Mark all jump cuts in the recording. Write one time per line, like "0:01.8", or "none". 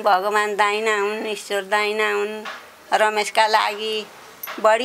none